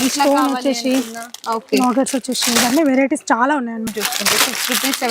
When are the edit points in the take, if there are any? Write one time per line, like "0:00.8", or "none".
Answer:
0:03.9